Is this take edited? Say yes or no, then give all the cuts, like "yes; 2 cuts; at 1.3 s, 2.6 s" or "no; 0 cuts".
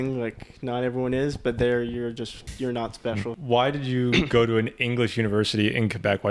yes; 2 cuts; at 2.4 s, 3.4 s